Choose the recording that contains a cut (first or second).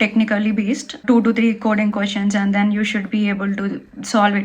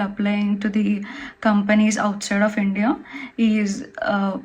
first